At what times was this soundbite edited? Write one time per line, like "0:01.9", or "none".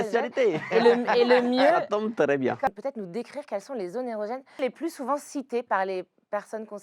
0:02.7